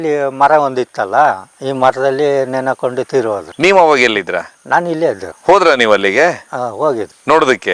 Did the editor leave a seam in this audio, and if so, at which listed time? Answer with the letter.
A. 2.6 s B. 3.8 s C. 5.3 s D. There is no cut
D